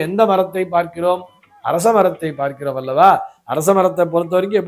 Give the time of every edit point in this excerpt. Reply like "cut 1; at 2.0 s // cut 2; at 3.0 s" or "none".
none